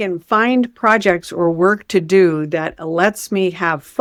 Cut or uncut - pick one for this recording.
uncut